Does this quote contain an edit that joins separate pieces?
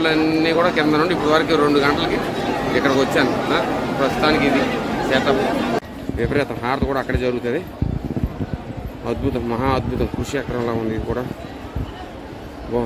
yes; 1 cut; at 5.8 s

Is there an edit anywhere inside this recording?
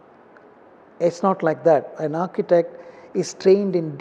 no; 0 cuts

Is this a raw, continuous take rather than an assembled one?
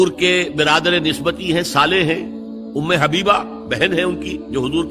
yes; 0 cuts

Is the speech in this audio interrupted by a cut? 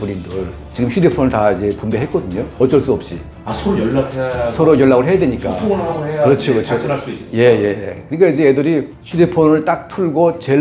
no; 0 cuts

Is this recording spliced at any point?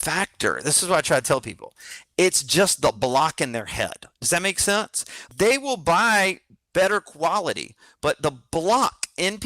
yes; 1 cut; at 5.2 s

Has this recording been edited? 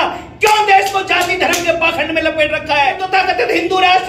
yes; 1 cut; at 3.0 s

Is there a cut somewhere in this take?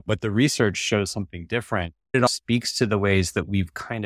yes; 1 cut; at 2.3 s

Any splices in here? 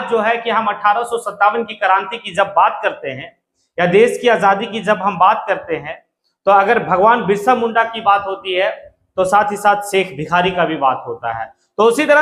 no; 0 cuts

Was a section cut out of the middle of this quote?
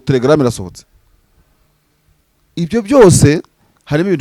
no; 0 cuts

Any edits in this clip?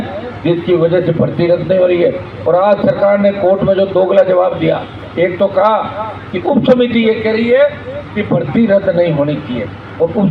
no; 0 cuts

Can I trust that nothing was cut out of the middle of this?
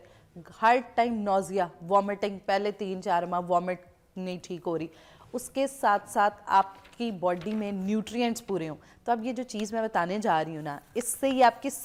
yes; 0 cuts

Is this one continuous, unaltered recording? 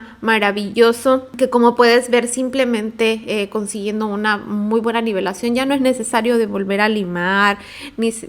no; 1 cut; at 1.3 s

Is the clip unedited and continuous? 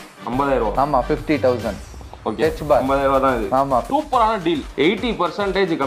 no; 2 cuts; at 3.9 s, 4.7 s

